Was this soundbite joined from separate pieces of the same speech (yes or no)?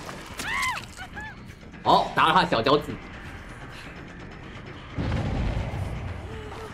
no